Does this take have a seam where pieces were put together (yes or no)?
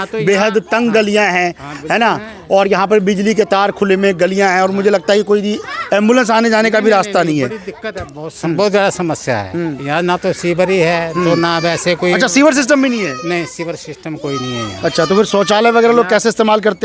no